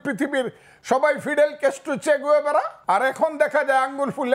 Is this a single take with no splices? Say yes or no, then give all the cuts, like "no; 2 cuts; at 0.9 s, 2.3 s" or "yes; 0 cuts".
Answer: no; 1 cut; at 2.8 s